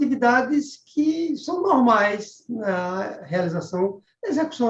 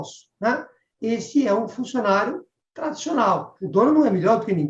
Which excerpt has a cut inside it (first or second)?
second